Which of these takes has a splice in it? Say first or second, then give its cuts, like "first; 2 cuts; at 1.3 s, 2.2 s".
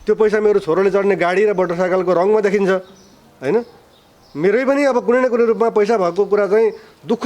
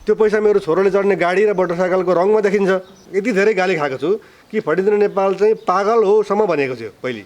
second; 1 cut; at 3.0 s